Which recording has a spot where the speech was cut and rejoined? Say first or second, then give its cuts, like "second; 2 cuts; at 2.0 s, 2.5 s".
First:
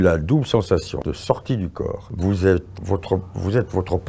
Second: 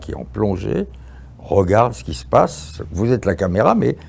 first; 3 cuts; at 1.0 s, 2.0 s, 2.7 s